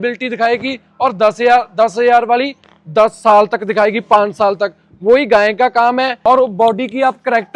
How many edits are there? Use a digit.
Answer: 1